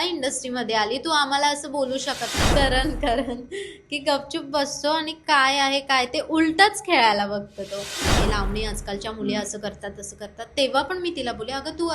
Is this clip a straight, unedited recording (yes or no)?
no